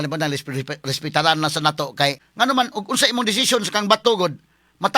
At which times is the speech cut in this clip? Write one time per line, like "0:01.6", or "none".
0:02.2